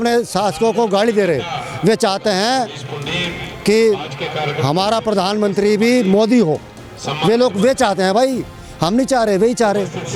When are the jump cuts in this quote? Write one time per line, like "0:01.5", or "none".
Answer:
none